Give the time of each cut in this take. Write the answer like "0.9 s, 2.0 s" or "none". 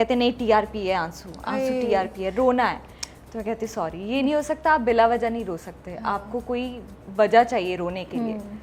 none